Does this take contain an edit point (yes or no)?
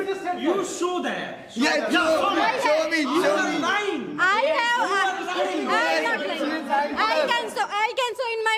no